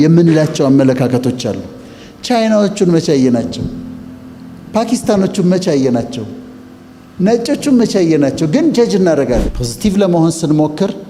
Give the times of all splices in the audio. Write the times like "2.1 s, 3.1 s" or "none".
9.5 s